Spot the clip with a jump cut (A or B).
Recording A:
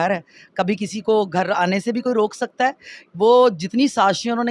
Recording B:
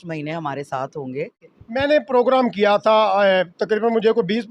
B